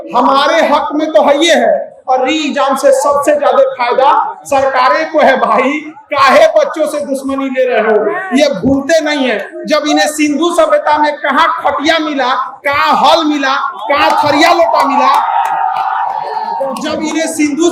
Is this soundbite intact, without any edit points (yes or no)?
yes